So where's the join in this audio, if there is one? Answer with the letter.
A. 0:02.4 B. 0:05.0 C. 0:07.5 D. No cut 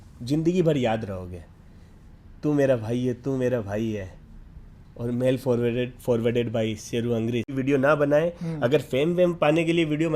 C